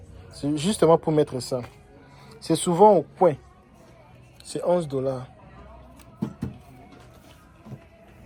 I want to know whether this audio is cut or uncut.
uncut